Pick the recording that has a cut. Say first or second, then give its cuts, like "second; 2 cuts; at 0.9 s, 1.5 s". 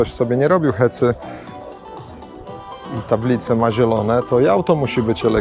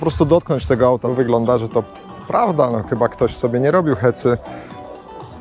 second; 1 cut; at 1.1 s